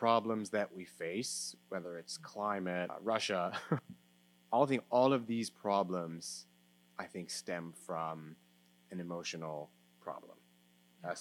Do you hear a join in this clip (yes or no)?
yes